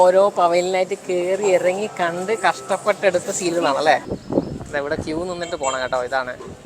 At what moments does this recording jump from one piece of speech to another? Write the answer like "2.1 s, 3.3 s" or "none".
4.1 s